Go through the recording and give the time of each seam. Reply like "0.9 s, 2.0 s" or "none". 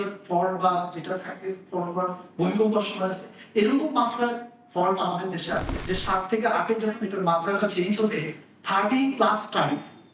5.7 s